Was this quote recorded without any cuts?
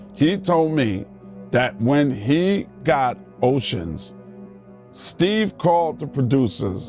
yes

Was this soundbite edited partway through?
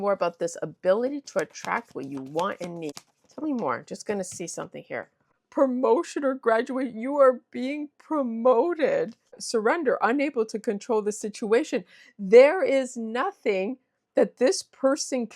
yes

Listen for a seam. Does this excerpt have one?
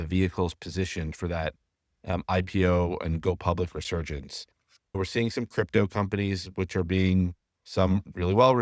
yes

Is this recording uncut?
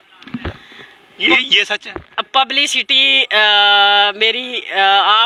yes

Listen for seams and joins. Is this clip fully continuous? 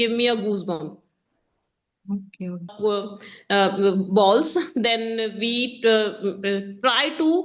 no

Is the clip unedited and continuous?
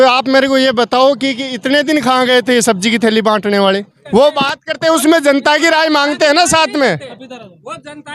no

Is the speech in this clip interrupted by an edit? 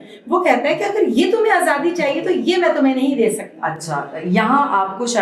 no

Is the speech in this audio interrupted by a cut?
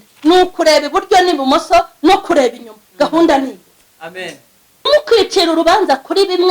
yes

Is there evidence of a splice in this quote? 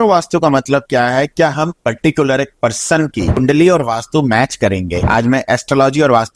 yes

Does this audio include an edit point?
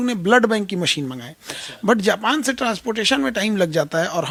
no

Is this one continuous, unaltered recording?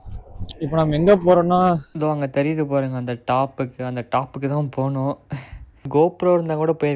no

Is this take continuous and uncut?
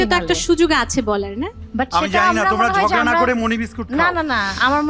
yes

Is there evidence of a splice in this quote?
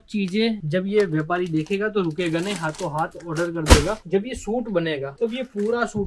yes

